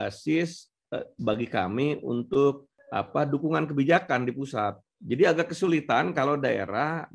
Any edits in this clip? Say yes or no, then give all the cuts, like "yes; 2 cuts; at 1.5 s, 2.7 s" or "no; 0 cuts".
no; 0 cuts